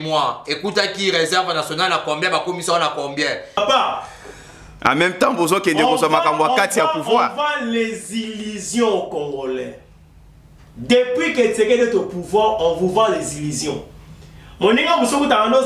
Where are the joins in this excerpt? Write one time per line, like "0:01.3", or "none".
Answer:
0:03.6